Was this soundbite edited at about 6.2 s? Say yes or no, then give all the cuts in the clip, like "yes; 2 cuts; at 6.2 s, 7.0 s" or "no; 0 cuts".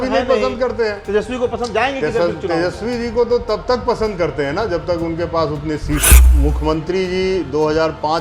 yes; 1 cut; at 6.2 s